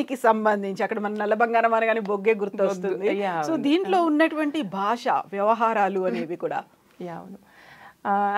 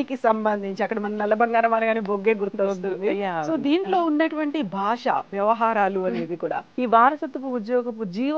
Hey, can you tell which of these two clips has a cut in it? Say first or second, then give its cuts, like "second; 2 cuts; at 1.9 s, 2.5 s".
second; 1 cut; at 6.6 s